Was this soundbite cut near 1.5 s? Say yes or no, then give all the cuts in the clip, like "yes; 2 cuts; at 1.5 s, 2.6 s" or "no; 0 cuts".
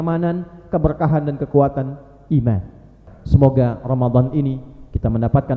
no; 1 cut; at 3.1 s